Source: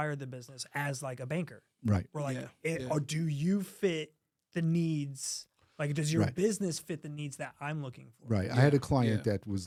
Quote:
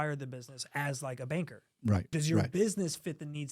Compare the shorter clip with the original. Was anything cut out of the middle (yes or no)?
yes